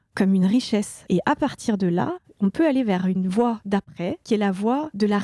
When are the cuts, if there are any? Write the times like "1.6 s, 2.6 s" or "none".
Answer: 1.0 s, 2.3 s